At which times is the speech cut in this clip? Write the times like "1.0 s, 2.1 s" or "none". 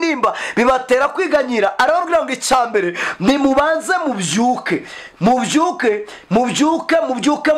none